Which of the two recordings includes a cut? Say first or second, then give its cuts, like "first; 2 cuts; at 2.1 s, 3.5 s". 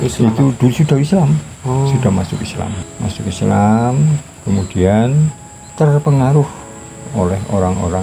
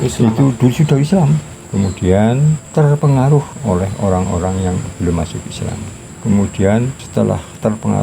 second; 5 cuts; at 1.5 s, 2.6 s, 3.5 s, 6.1 s, 7.0 s